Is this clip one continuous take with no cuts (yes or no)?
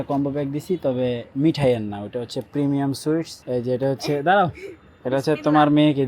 no